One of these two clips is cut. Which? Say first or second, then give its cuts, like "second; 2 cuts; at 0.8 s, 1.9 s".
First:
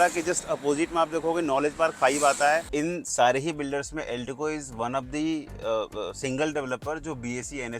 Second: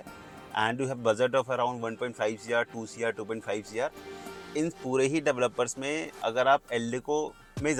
first; 1 cut; at 2.7 s